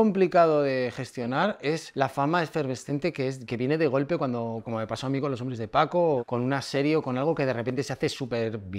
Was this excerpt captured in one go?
no; 2 cuts; at 1.9 s, 6.2 s

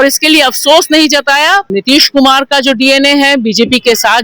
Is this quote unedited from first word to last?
no; 1 cut; at 1.7 s

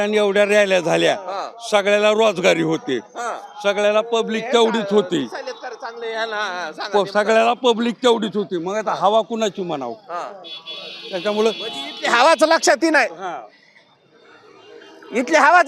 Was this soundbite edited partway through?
no; 0 cuts

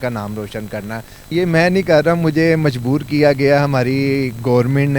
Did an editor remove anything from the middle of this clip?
yes; 1 cut; at 1.3 s

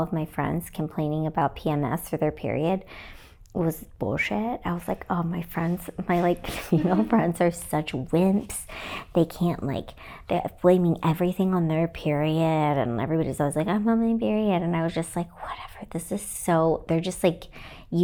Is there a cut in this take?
no; 0 cuts

